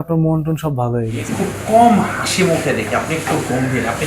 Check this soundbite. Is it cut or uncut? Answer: cut